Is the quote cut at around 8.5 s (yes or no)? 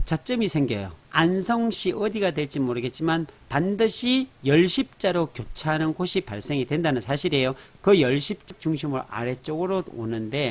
yes